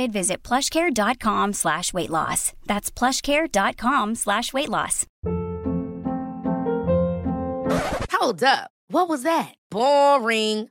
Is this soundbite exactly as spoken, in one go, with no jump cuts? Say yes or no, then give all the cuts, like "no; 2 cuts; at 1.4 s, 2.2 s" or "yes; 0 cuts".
no; 1 cut; at 5.0 s